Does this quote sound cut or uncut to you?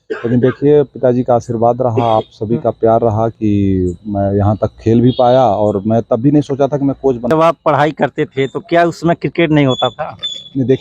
cut